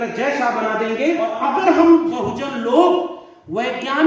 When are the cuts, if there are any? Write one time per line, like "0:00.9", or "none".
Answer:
0:01.3